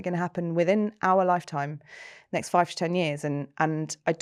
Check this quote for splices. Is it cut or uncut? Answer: uncut